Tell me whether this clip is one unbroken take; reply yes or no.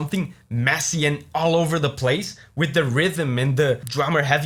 yes